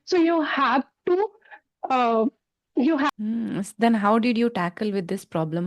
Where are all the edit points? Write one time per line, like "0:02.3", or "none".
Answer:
0:03.1